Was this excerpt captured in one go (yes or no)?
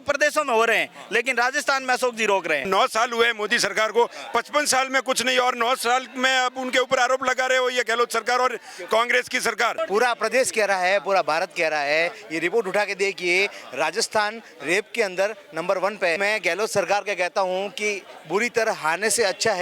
no